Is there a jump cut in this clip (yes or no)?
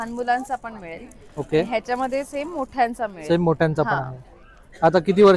no